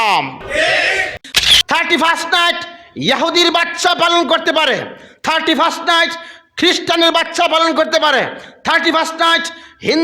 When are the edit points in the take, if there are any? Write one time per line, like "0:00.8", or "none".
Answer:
0:01.4